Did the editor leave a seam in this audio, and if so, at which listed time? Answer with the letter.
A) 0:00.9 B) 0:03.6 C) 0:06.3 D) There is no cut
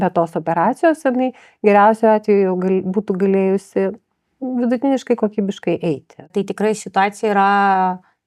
C